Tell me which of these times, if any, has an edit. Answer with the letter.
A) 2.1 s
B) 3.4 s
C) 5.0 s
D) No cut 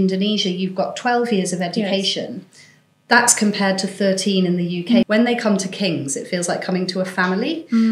C